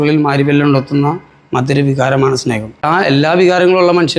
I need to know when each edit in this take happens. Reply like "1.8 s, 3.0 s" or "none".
2.8 s